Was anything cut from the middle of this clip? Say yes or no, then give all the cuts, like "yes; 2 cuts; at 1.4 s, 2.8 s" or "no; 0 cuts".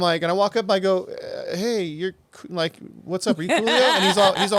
no; 0 cuts